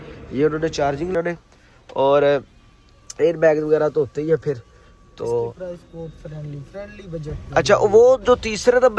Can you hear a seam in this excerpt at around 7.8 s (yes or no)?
no